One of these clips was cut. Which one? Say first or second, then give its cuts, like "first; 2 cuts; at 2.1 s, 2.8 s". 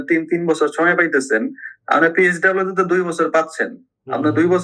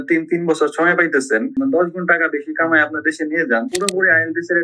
second; 2 cuts; at 1.5 s, 3.7 s